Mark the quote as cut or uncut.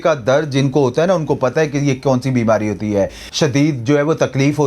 cut